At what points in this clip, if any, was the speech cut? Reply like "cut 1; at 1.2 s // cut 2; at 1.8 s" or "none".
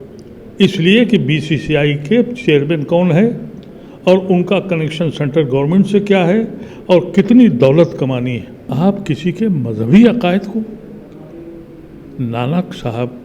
cut 1; at 8.7 s